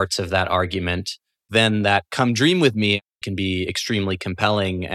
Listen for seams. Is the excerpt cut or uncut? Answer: cut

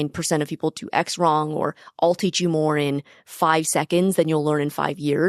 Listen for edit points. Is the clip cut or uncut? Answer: uncut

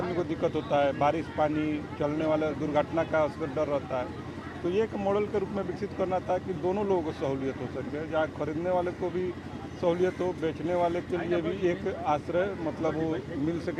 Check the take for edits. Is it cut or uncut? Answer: uncut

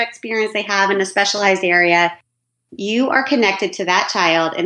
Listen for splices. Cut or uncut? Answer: uncut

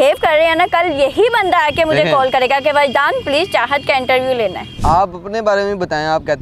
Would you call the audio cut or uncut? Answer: cut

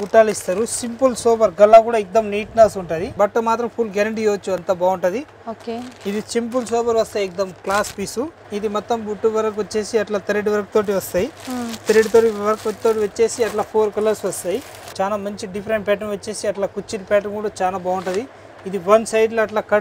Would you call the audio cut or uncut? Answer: cut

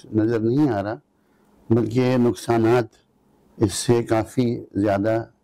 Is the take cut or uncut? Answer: uncut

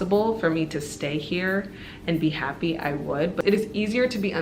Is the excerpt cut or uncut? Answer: cut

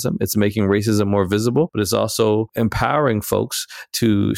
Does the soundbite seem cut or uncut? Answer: cut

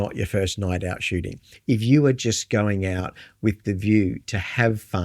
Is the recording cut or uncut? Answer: cut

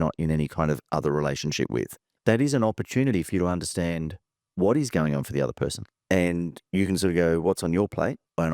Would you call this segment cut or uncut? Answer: cut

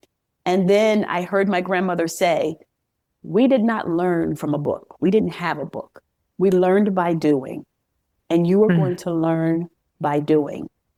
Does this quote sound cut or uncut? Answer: uncut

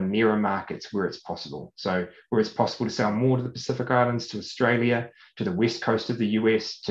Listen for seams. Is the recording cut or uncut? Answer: uncut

